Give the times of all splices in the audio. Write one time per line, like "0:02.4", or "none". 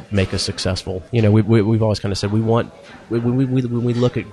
none

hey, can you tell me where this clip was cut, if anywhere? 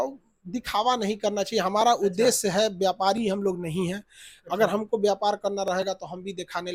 none

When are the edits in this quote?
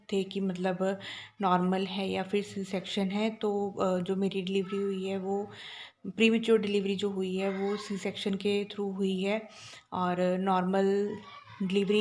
none

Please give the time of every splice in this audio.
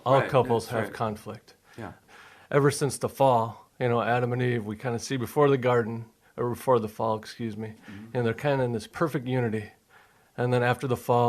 0:02.0

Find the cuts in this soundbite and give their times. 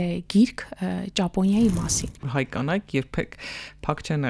0:02.3

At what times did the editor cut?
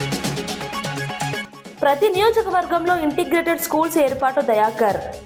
0:01.4

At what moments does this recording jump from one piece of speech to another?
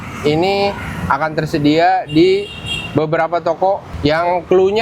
0:03.9

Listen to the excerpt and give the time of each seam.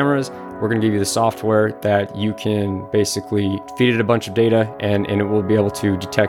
0:03.6

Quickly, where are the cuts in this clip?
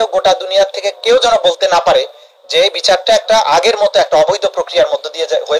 none

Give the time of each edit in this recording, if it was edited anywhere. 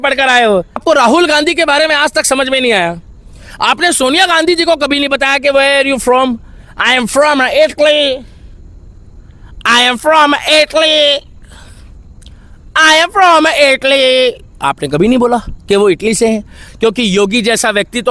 0:00.8
0:16.7

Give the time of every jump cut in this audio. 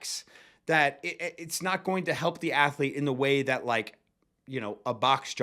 none

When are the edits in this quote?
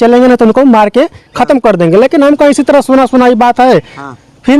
none

